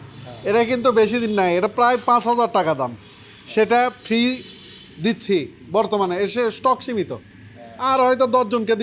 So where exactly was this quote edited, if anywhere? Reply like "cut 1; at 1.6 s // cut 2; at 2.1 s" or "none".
none